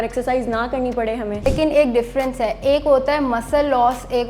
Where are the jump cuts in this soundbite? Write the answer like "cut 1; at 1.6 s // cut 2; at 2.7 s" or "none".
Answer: cut 1; at 1.5 s